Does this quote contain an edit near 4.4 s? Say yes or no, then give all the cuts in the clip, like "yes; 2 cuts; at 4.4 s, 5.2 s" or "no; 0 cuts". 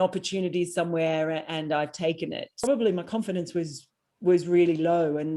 no; 1 cut; at 2.7 s